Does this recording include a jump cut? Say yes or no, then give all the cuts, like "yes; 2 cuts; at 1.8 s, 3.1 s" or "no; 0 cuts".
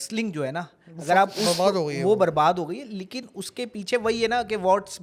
no; 0 cuts